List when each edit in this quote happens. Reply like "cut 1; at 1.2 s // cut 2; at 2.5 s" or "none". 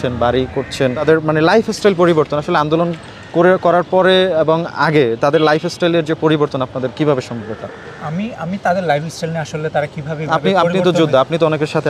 none